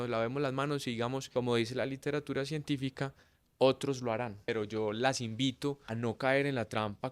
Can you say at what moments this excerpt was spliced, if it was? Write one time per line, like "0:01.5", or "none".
0:01.2
0:04.5
0:05.9